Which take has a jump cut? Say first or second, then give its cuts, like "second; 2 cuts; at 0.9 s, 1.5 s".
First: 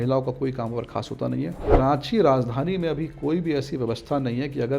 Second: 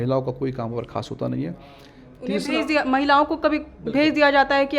first; 1 cut; at 1.7 s